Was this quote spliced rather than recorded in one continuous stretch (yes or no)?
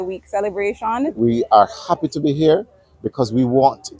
yes